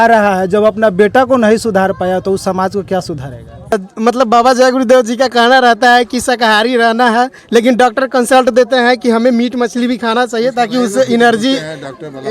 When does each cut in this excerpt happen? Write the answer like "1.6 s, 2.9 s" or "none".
3.7 s